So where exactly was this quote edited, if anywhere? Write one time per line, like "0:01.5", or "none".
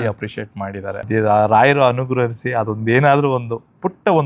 0:01.0